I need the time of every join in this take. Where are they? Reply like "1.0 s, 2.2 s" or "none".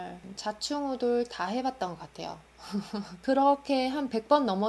3.1 s